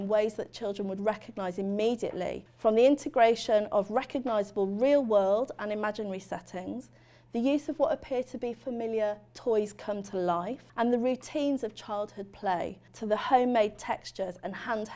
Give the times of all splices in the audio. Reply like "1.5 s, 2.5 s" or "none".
2.4 s, 10.6 s, 12.9 s